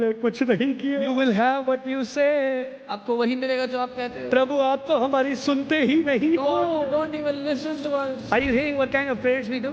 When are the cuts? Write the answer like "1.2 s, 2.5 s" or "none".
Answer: 1.1 s